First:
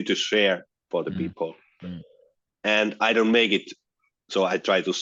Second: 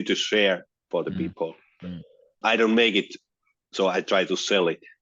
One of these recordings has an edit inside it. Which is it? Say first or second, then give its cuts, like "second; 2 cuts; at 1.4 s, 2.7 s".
second; 1 cut; at 2.4 s